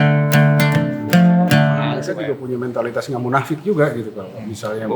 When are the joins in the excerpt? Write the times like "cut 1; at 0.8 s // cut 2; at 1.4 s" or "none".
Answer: cut 1; at 1.9 s